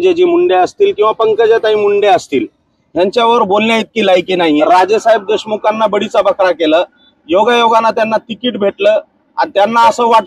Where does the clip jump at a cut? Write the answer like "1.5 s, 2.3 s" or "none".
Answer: 4.6 s